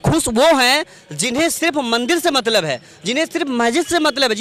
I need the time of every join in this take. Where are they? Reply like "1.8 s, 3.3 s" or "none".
none